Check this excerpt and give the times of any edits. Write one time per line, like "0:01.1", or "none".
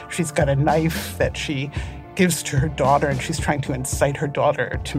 none